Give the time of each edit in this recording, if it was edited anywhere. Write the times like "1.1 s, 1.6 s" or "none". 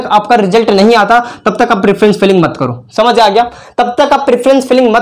none